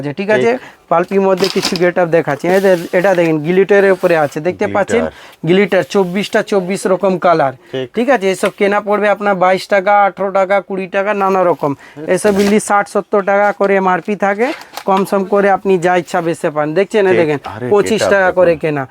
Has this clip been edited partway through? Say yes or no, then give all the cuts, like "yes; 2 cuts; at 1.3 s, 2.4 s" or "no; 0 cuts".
no; 0 cuts